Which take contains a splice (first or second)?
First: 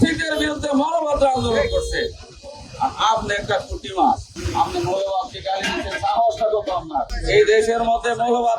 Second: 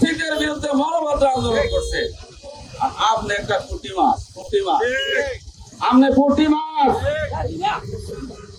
first